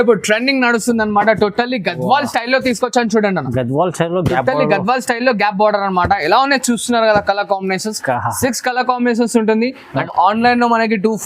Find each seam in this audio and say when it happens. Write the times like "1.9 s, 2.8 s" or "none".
10.0 s